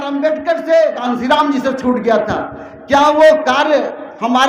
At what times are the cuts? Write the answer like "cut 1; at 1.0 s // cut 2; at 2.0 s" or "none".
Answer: cut 1; at 1.0 s